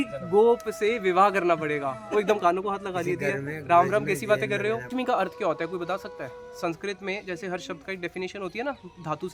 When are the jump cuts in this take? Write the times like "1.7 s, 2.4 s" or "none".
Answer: 4.9 s